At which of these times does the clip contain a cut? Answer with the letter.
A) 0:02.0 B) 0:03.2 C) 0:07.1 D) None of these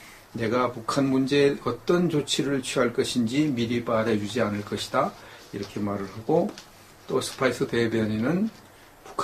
B